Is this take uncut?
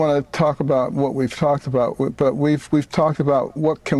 no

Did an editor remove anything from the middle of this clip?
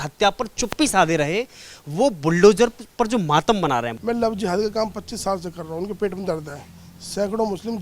yes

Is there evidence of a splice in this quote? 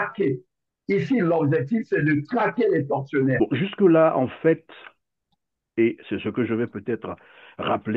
yes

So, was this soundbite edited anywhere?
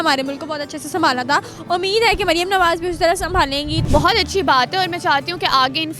yes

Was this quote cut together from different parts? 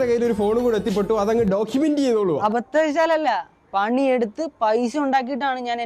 no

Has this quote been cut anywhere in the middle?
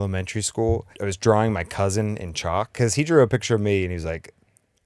yes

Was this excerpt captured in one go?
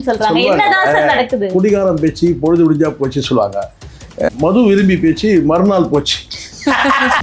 no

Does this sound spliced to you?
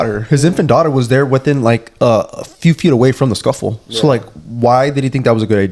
no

